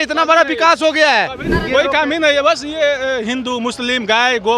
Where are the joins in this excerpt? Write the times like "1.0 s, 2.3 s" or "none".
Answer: 1.5 s